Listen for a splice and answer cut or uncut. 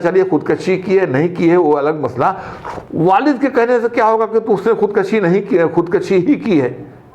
uncut